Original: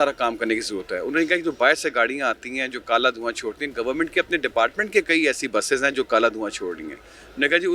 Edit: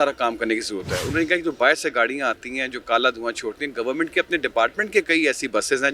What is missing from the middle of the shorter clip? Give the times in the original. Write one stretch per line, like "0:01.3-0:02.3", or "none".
none